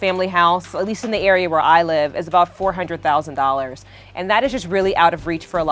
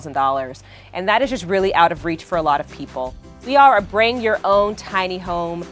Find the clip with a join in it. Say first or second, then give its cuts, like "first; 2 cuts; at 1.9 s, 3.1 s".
second; 1 cut; at 3.4 s